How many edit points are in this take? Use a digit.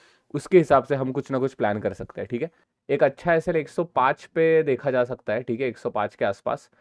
1